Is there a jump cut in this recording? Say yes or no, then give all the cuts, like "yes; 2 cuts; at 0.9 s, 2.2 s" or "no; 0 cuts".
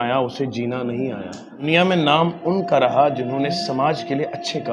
yes; 1 cut; at 1.6 s